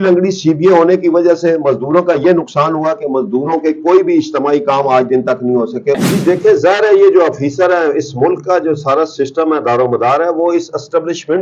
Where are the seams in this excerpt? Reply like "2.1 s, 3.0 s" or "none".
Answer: 6.0 s